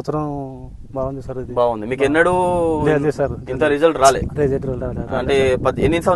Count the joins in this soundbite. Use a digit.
0